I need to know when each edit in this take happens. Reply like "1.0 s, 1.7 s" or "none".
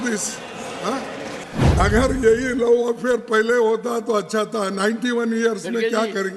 1.4 s